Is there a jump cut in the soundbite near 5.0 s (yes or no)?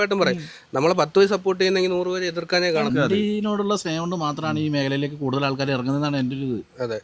no